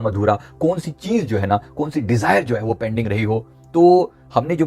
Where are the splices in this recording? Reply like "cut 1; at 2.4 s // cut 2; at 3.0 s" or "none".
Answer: none